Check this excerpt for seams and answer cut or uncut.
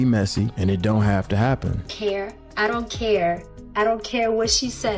cut